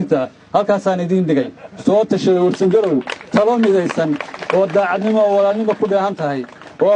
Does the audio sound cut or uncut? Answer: uncut